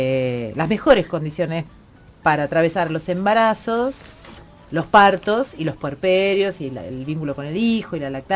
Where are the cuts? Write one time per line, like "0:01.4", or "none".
0:02.6